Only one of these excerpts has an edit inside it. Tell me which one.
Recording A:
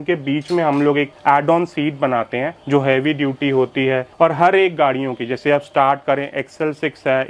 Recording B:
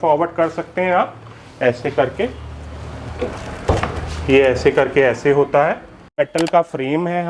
B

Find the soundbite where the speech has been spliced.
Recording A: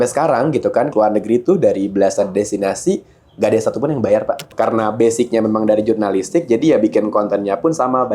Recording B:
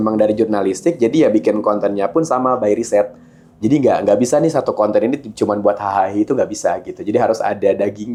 A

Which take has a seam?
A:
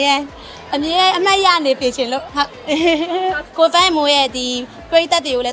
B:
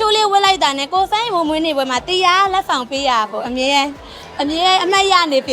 A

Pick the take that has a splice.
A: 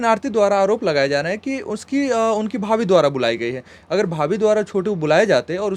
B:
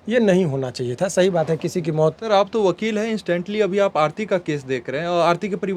B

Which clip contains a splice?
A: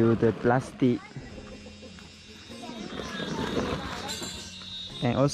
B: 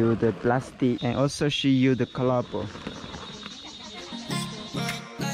B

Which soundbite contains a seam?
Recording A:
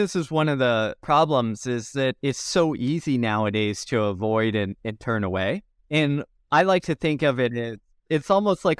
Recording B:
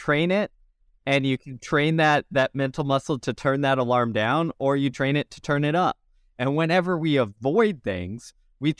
A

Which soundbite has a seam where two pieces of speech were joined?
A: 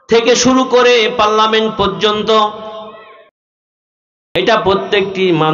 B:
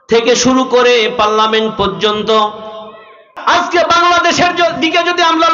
B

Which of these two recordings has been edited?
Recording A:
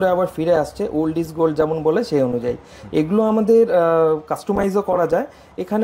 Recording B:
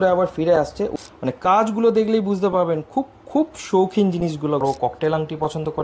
B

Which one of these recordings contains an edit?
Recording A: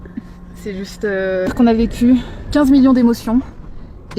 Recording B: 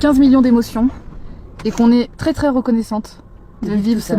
A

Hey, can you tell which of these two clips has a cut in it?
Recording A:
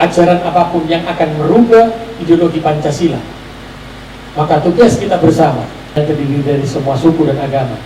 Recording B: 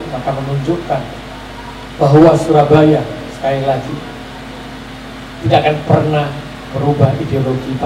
A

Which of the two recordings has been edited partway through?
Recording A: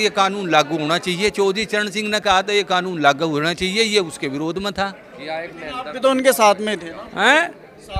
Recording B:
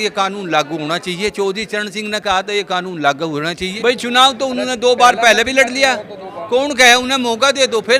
B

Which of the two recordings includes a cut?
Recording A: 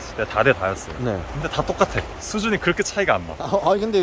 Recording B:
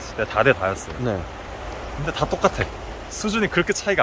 A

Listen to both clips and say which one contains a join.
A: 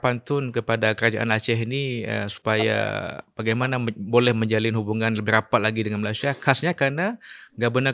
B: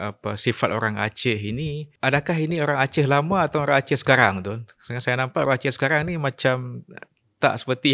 B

